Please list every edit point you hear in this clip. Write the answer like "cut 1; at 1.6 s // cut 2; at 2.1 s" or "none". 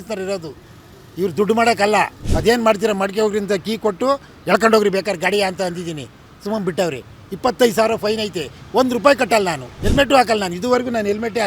cut 1; at 2.2 s // cut 2; at 9.7 s